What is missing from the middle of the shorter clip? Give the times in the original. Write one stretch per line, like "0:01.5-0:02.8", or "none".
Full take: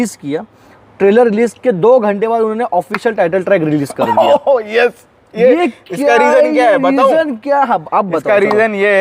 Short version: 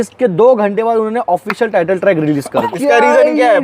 0:04.1-0:05.8